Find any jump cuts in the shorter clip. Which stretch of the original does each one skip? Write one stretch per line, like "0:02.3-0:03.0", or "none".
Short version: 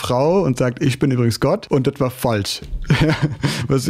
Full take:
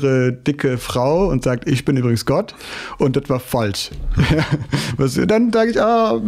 0:02.5-0:02.9